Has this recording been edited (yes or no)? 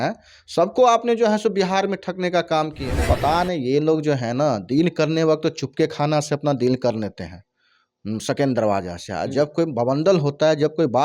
yes